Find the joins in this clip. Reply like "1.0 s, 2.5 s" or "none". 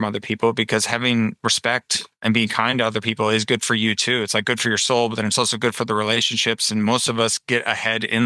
2.2 s